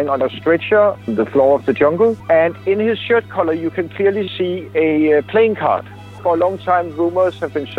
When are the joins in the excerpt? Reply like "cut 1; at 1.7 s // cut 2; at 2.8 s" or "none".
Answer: cut 1; at 1.0 s // cut 2; at 2.2 s // cut 3; at 6.1 s